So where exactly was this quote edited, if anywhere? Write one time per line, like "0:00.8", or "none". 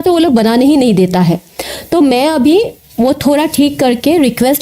none